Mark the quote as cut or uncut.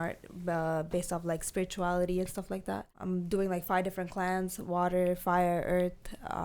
cut